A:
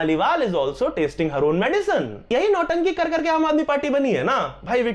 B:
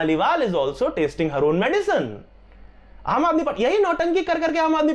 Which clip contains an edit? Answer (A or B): A